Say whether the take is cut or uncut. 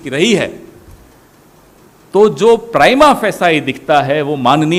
uncut